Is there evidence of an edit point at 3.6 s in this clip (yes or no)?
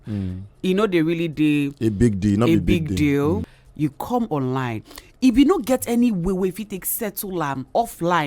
yes